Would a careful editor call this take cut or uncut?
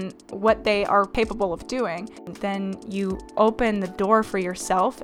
cut